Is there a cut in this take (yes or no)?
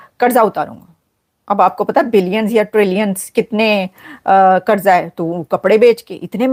no